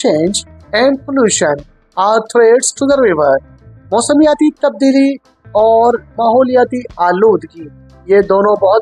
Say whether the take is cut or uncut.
uncut